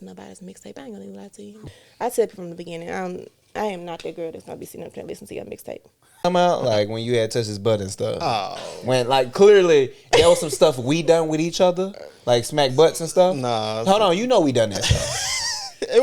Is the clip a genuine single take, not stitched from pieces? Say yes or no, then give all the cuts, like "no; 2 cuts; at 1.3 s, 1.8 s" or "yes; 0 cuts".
no; 2 cuts; at 1.6 s, 6.2 s